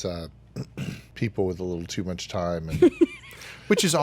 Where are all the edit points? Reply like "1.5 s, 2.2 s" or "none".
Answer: 1.1 s